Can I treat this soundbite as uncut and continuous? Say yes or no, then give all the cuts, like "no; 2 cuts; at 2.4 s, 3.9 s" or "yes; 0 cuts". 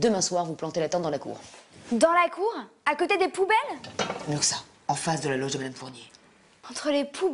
no; 1 cut; at 2.7 s